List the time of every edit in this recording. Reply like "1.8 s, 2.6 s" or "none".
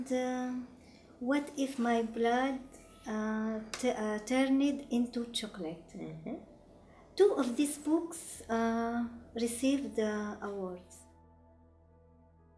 none